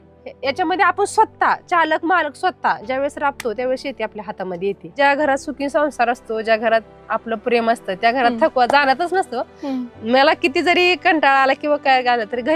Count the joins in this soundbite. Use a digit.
1